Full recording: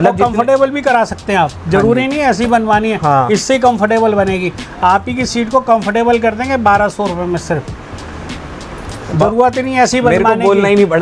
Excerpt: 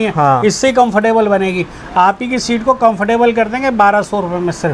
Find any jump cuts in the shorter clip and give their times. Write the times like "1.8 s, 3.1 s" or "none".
none